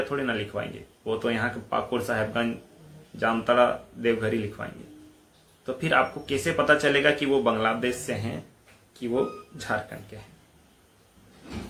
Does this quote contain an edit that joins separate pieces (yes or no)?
no